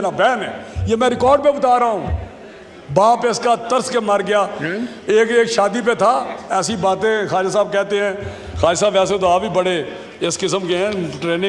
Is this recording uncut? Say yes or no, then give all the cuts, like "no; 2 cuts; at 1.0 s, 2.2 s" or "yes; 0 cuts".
yes; 0 cuts